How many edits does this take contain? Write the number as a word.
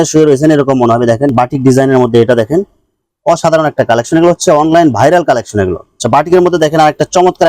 two